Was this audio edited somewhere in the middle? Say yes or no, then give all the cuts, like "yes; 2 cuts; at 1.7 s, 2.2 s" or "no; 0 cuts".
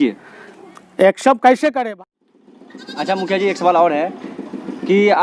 yes; 1 cut; at 1.8 s